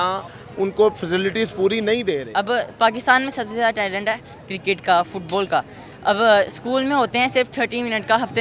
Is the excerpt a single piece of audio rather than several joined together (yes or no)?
no